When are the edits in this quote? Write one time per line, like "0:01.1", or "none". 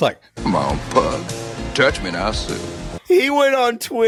none